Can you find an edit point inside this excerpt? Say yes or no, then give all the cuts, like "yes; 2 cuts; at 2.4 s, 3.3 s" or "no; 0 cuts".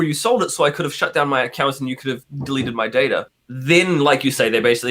yes; 1 cut; at 3.4 s